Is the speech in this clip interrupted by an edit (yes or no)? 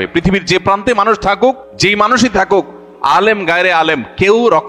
yes